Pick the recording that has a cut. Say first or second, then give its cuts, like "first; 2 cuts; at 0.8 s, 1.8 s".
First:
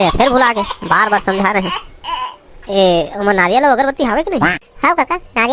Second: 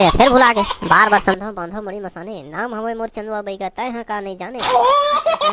second; 1 cut; at 1.3 s